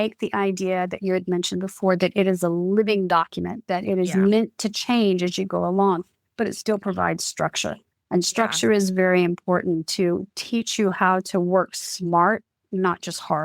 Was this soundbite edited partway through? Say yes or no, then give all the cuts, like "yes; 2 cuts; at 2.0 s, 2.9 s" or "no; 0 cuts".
no; 0 cuts